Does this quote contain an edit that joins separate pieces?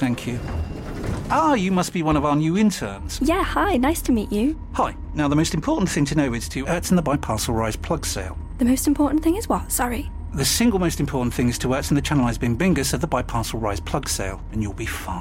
no; 0 cuts

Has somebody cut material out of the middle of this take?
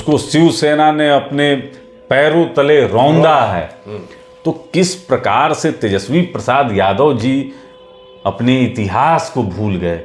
no; 0 cuts

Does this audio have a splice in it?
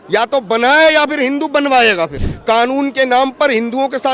yes; 1 cut; at 2.3 s

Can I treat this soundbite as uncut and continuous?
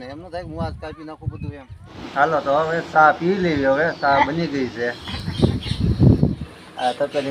no; 1 cut; at 1.5 s

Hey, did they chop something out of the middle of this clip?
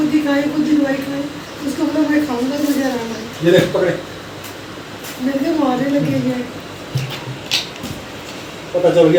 no; 0 cuts

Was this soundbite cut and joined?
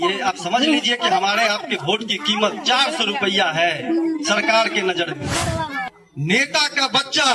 yes; 1 cut; at 5.8 s

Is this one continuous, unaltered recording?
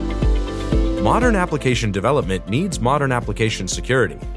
no; 1 cut; at 1.0 s

